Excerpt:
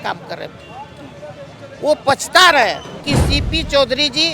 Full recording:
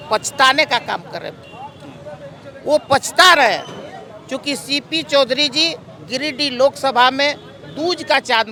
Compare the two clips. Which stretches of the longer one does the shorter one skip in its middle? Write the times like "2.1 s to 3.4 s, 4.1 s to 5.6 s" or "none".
3.8 s to 4.4 s